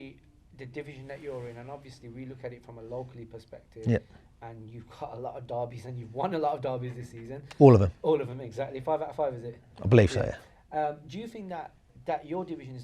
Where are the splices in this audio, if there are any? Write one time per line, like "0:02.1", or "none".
none